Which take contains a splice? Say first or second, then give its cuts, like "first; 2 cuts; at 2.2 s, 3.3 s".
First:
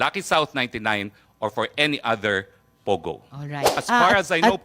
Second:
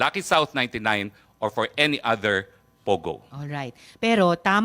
first; 1 cut; at 3.7 s